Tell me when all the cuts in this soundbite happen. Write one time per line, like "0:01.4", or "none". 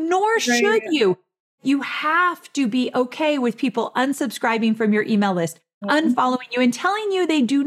0:01.4